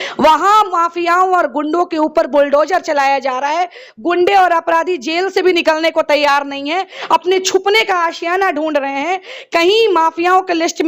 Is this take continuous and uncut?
yes; 0 cuts

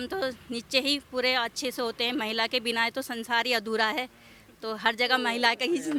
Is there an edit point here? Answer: no; 0 cuts

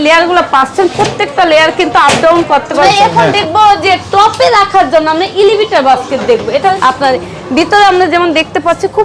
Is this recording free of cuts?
no; 2 cuts; at 2.8 s, 6.8 s

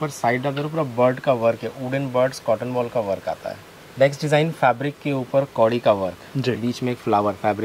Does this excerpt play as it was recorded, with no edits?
no; 1 cut; at 3.8 s

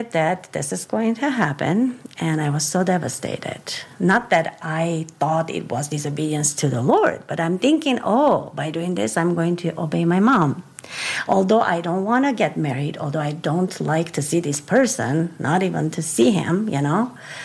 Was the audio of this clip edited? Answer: no; 0 cuts

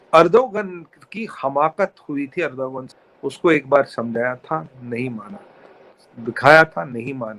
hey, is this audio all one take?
no; 1 cut; at 2.8 s

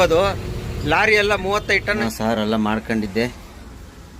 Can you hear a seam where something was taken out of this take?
yes; 1 cut; at 2.0 s

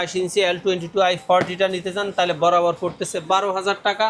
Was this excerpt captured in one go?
yes; 0 cuts

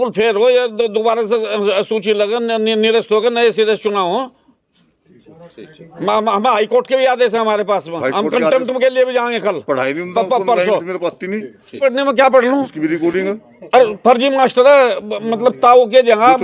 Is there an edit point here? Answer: no; 0 cuts

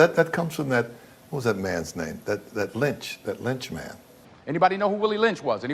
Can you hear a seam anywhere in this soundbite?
yes; 1 cut; at 4.6 s

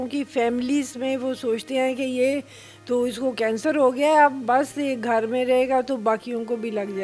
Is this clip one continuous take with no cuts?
yes; 0 cuts

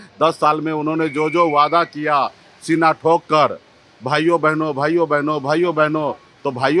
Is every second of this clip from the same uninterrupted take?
yes; 0 cuts

